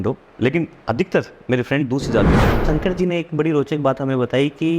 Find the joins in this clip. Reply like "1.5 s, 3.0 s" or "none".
2.6 s

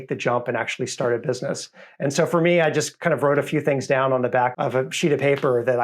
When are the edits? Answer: 4.5 s

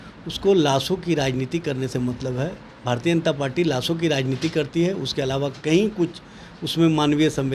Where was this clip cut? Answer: none

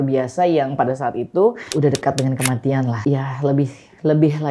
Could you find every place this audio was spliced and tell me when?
1.7 s, 3.0 s

